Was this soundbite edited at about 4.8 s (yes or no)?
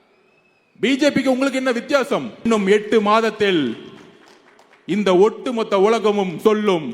no